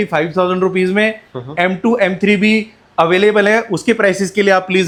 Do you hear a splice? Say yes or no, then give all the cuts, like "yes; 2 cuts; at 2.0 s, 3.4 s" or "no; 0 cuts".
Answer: no; 0 cuts